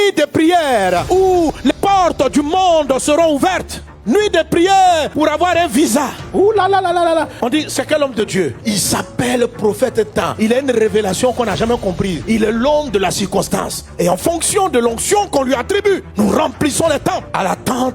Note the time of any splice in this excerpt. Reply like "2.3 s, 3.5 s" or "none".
1.7 s

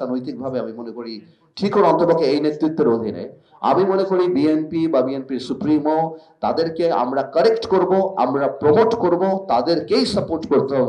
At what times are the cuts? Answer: none

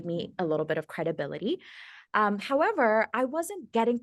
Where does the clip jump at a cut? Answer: none

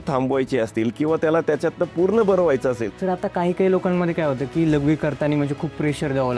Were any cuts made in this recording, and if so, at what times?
2.9 s

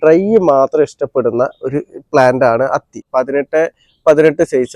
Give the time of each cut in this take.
3.0 s

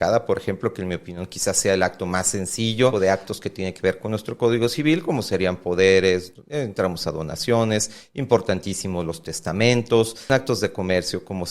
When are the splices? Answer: 2.9 s, 10.3 s

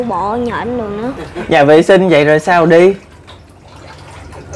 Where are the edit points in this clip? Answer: 1.3 s

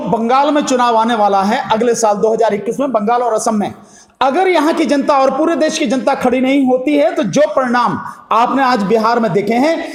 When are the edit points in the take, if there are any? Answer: none

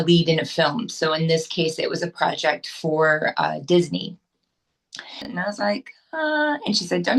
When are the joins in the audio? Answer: 5.3 s

